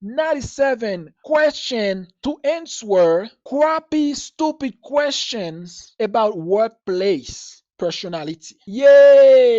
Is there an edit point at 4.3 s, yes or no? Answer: no